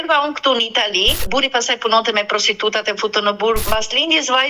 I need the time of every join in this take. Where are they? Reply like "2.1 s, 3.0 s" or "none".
1.2 s, 3.6 s